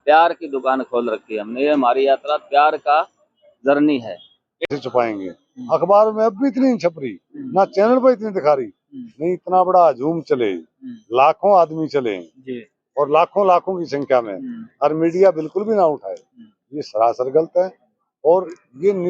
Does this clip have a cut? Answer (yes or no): yes